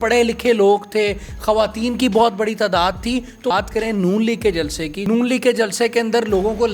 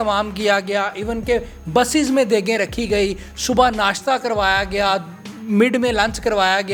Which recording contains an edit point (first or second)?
first